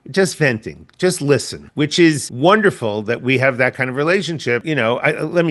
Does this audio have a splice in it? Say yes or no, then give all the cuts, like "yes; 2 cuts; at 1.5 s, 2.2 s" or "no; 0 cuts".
yes; 3 cuts; at 1.6 s, 2.3 s, 4.7 s